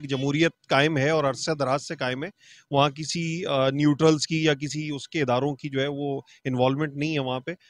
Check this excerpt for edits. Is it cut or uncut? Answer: uncut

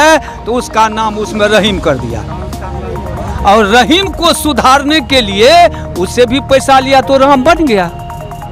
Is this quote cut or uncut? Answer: uncut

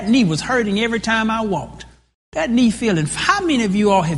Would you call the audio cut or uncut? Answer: uncut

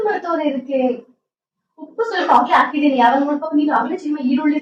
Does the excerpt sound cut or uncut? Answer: uncut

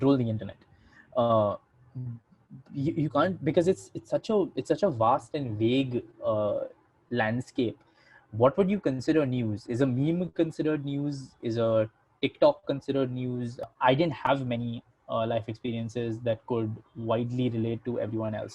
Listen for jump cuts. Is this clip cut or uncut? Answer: cut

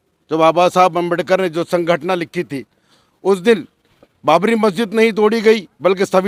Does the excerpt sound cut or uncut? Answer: uncut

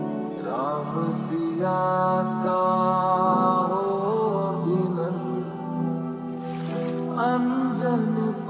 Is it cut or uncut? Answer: uncut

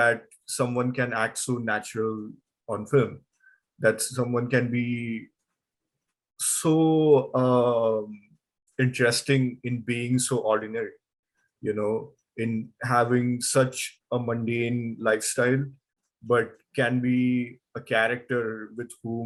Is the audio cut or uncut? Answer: uncut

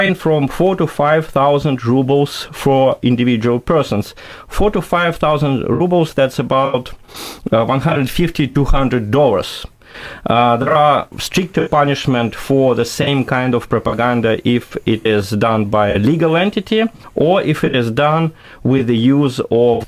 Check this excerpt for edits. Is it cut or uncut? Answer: cut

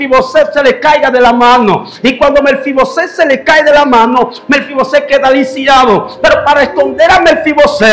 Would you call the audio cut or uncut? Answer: uncut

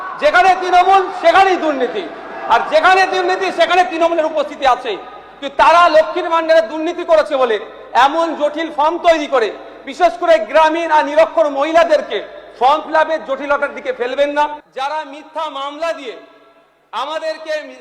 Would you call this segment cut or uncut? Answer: cut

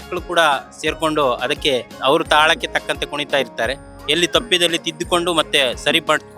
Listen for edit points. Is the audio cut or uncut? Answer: cut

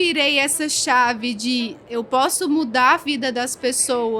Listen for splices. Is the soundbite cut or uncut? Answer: uncut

